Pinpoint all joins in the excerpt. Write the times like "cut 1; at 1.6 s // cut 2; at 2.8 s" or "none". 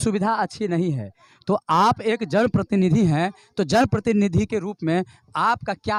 none